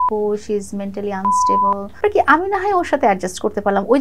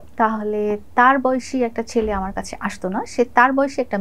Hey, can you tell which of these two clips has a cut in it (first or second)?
first